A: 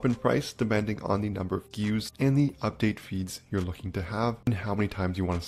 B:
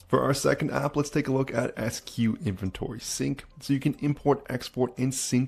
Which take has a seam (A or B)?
A